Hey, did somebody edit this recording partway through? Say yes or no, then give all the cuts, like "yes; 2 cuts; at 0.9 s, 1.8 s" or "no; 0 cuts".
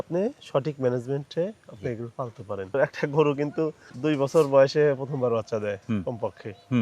no; 0 cuts